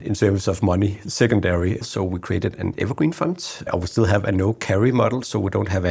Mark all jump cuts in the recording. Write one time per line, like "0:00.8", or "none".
0:01.8
0:03.7